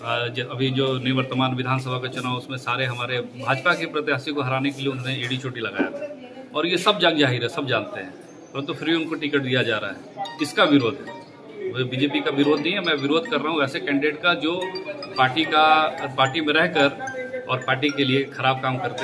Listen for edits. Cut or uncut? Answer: uncut